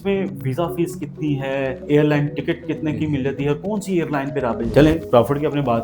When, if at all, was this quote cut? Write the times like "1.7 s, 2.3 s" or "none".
4.6 s